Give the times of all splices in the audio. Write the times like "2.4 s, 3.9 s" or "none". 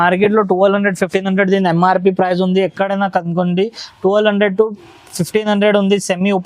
none